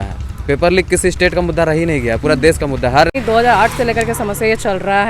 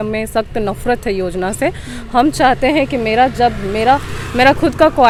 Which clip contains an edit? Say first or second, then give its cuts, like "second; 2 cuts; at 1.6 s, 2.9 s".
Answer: first; 1 cut; at 3.2 s